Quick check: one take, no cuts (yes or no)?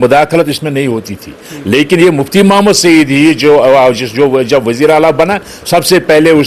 yes